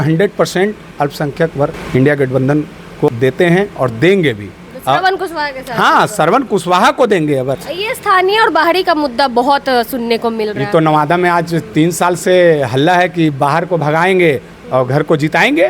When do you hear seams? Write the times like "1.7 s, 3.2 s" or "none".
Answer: 1.8 s, 3.1 s, 7.6 s